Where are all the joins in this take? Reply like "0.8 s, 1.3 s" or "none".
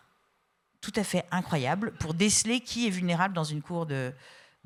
none